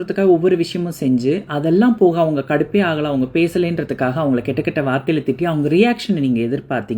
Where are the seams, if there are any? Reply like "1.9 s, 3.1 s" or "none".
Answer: none